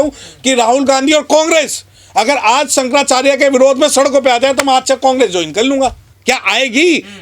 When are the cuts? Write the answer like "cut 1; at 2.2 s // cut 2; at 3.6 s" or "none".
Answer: none